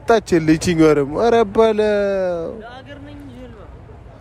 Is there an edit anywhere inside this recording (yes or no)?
no